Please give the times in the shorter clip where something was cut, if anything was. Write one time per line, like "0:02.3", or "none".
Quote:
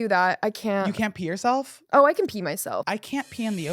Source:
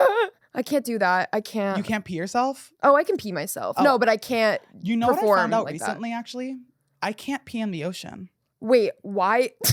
0:02.7